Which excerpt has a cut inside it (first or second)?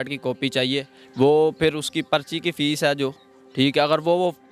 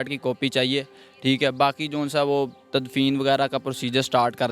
first